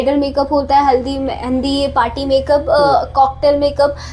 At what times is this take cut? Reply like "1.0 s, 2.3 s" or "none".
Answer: none